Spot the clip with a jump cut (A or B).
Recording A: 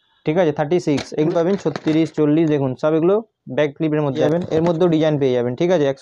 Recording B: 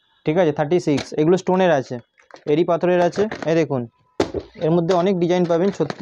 A